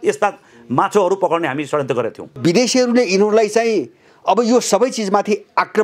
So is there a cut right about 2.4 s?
yes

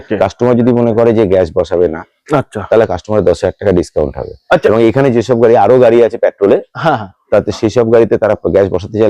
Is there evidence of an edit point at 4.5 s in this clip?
no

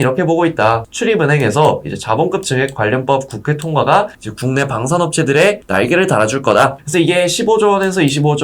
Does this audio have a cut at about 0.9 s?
yes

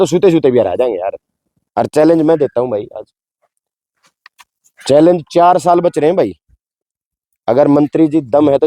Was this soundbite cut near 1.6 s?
yes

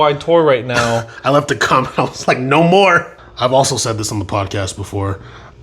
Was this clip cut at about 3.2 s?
yes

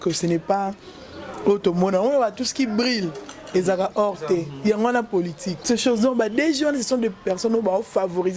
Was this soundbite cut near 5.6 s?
yes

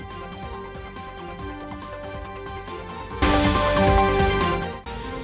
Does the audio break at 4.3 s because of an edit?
no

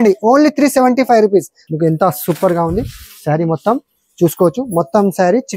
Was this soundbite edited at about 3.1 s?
no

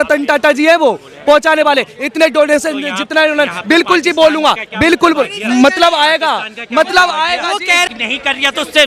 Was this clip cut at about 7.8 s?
yes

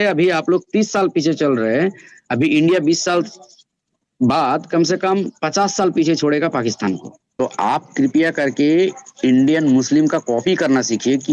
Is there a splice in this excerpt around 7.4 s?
yes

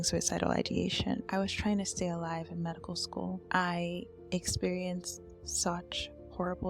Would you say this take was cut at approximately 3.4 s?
yes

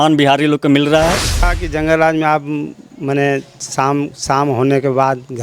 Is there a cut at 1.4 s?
yes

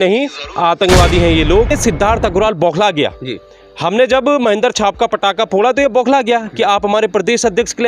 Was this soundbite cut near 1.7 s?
yes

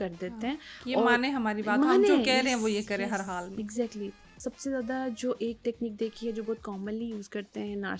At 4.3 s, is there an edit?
yes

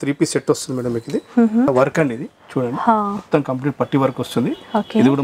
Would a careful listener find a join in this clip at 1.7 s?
yes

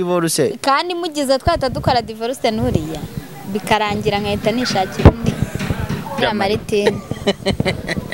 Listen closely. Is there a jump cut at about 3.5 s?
no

